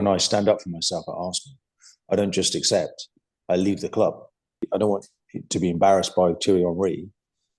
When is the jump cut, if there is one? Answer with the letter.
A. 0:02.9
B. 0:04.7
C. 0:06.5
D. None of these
B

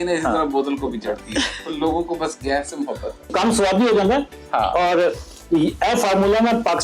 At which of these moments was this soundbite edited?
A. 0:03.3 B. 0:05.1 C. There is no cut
A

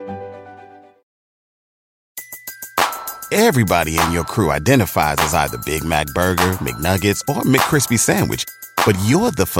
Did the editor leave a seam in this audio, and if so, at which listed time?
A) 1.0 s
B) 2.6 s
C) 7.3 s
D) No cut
D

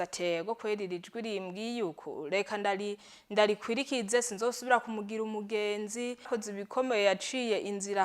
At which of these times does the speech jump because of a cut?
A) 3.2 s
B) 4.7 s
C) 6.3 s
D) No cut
C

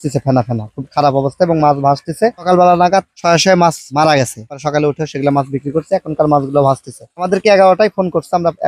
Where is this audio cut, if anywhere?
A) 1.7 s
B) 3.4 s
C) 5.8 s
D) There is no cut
D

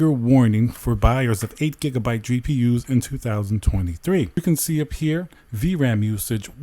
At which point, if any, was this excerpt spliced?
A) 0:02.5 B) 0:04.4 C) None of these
B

